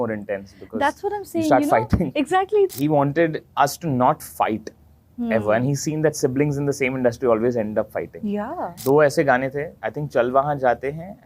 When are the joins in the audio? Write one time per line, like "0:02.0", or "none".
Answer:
0:02.7
0:08.7

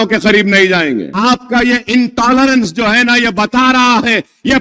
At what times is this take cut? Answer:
0:01.1

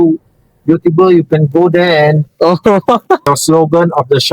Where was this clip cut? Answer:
0:03.3

